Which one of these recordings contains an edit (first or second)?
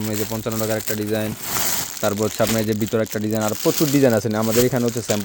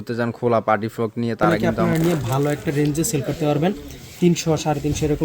second